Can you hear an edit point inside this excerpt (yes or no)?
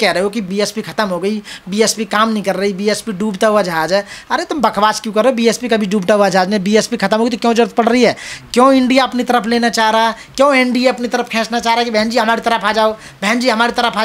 no